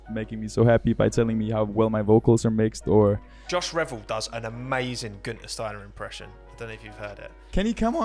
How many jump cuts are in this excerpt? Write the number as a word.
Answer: one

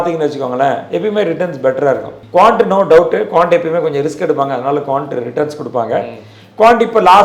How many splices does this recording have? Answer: one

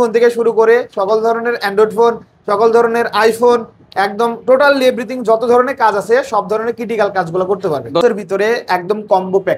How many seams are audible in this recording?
one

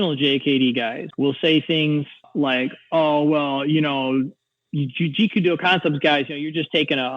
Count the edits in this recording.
two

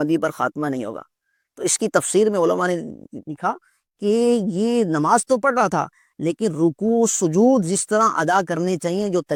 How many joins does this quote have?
zero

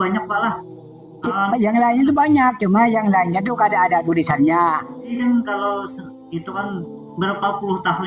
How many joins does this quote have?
one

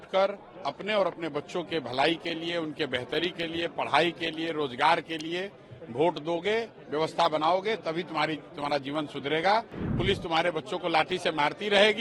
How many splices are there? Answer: one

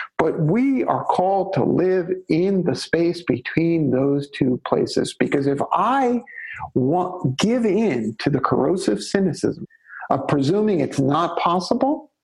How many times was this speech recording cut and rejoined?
one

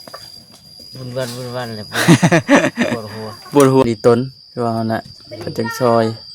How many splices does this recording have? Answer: one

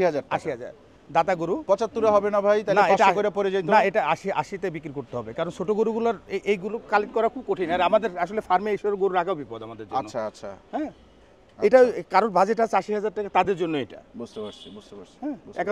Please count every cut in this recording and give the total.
zero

